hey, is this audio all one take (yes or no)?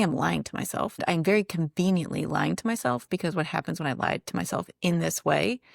no